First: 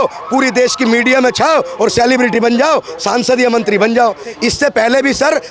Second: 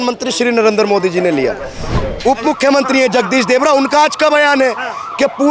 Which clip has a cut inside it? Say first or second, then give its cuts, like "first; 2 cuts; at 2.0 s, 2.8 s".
second; 1 cut; at 2.0 s